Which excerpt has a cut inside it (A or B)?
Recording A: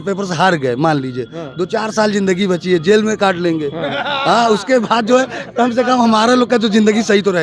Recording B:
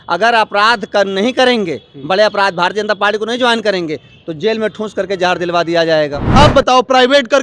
B